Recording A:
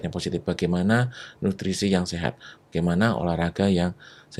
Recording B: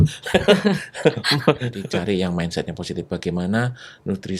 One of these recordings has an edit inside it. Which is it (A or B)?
B